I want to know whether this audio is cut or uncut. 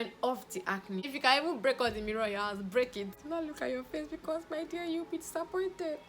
cut